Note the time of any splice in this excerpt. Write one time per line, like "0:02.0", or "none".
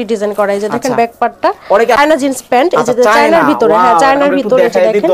0:02.0